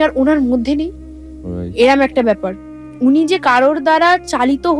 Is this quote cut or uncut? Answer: uncut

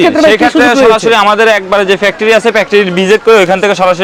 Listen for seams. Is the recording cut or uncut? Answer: uncut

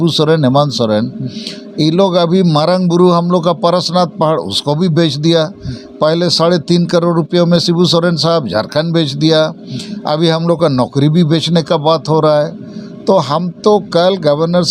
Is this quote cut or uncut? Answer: uncut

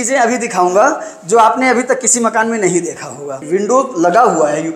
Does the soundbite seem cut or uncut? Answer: cut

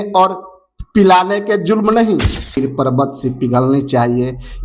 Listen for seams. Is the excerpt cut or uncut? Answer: cut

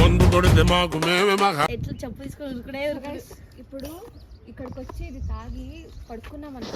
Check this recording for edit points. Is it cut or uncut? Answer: uncut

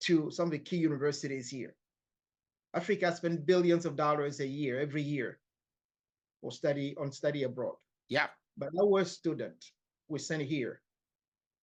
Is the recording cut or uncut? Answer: uncut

